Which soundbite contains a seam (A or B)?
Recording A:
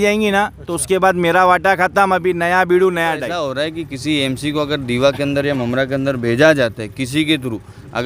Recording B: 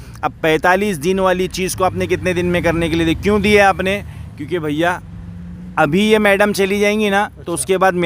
A